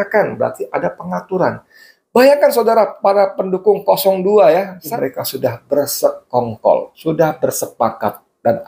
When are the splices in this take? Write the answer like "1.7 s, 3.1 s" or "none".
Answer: 4.9 s